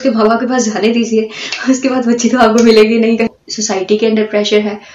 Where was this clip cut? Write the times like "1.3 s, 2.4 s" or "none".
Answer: 3.3 s